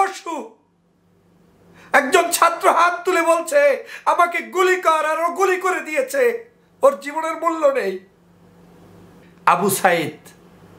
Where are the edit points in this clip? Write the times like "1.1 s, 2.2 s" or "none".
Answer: 9.2 s